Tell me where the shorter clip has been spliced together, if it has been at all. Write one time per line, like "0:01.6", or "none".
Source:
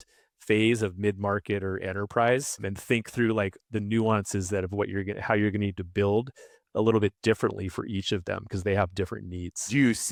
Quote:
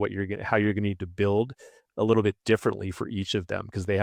none